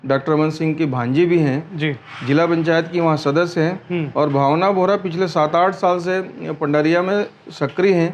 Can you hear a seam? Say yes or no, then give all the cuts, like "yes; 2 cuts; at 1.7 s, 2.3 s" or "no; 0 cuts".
no; 0 cuts